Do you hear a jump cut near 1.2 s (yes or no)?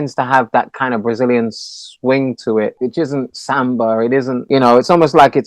no